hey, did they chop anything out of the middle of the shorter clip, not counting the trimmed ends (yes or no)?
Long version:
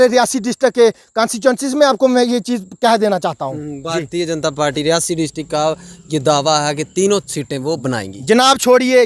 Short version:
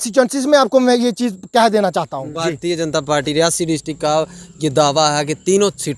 yes